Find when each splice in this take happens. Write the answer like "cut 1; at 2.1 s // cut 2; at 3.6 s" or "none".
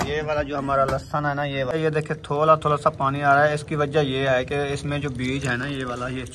cut 1; at 1.7 s